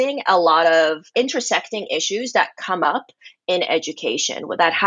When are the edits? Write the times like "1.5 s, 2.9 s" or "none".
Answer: 1.1 s